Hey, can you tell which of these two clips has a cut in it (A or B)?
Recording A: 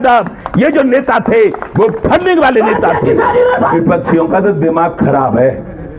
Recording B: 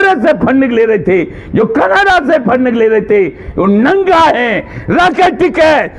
A